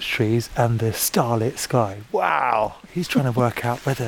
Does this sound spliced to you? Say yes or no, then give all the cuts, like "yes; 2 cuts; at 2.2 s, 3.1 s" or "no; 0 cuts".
yes; 1 cut; at 2.8 s